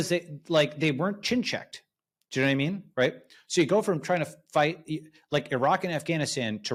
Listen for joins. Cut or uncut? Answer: uncut